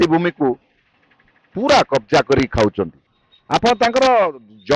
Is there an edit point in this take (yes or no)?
yes